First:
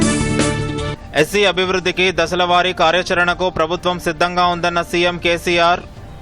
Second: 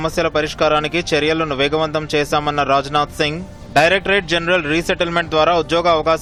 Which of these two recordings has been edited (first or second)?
first